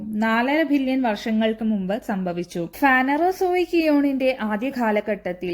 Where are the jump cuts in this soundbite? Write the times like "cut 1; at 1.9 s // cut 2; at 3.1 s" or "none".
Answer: cut 1; at 2.7 s